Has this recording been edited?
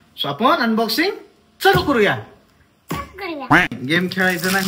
yes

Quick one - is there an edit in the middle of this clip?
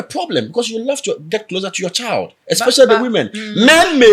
no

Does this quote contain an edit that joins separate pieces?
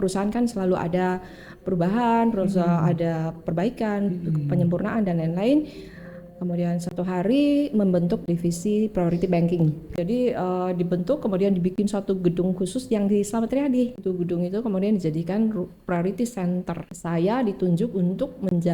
yes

